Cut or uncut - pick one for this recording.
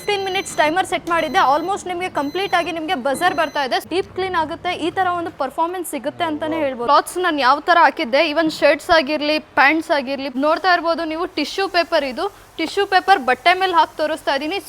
cut